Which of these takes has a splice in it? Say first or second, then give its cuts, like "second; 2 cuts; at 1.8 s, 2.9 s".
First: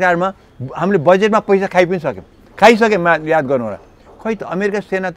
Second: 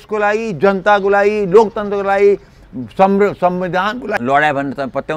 second; 1 cut; at 4.2 s